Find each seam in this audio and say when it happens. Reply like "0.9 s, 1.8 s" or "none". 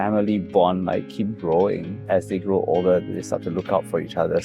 2.0 s